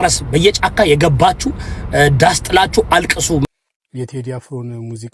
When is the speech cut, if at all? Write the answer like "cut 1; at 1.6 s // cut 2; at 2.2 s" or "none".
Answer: cut 1; at 3.4 s

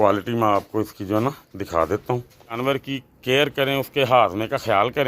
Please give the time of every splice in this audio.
cut 1; at 2.6 s

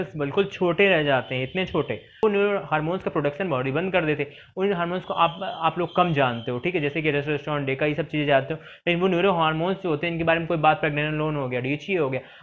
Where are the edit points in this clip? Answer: cut 1; at 2.2 s

